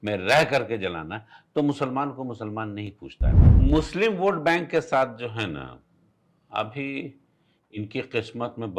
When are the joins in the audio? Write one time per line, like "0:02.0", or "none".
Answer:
0:03.3